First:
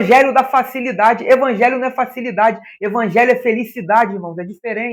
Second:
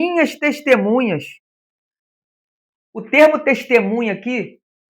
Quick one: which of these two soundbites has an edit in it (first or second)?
second